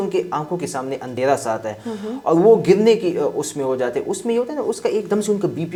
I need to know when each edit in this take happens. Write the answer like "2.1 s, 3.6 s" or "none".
none